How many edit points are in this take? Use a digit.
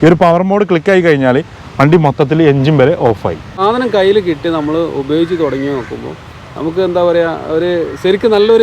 1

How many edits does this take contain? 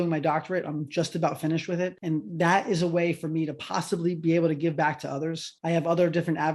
2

